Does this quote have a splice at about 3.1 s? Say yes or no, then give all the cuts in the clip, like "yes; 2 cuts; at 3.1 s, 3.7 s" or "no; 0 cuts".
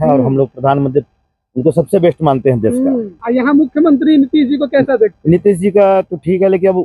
yes; 1 cut; at 3.1 s